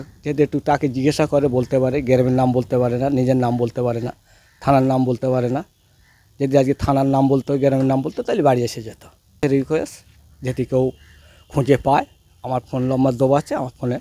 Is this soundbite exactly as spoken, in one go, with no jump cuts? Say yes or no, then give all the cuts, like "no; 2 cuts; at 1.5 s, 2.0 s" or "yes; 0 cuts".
no; 1 cut; at 9.4 s